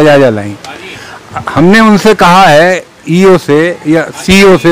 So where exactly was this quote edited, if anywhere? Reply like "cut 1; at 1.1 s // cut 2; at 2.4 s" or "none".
none